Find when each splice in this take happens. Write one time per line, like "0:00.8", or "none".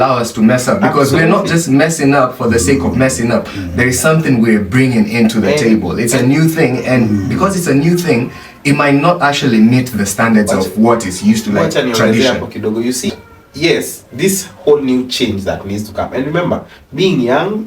0:13.1